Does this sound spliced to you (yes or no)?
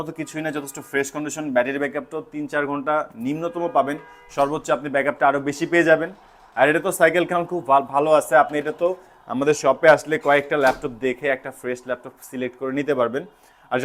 no